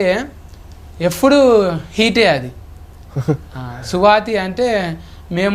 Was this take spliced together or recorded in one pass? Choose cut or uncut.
uncut